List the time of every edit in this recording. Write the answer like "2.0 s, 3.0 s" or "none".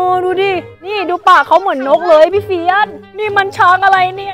3.1 s

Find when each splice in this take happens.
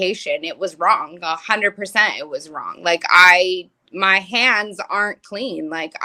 none

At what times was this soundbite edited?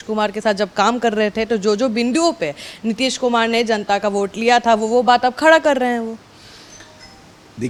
none

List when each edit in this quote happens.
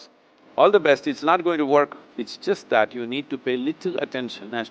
2.0 s

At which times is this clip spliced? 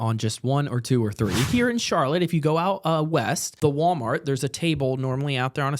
1.5 s, 3.5 s

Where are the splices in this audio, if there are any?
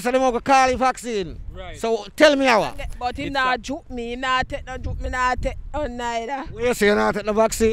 2.9 s

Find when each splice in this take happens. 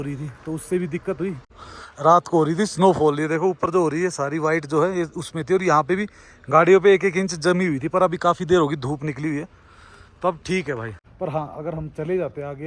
1.6 s, 11.0 s

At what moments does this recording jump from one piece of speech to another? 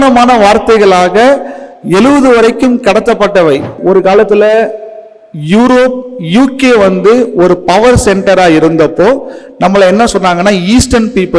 3.8 s

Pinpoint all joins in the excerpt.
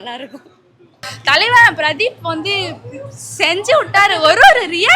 1.0 s

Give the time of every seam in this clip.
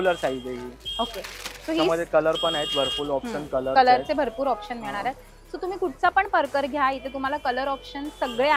none

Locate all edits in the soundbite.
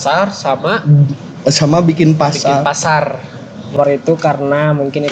3.8 s

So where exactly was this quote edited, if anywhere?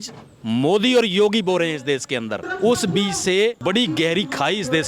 2.4 s, 3.6 s

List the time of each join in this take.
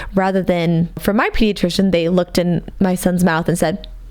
1.0 s

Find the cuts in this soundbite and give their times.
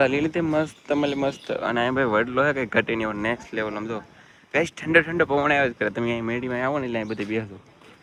none

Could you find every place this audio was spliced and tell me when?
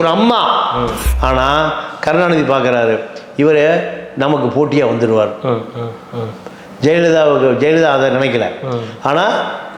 1.0 s

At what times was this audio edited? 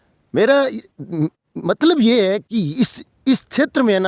none

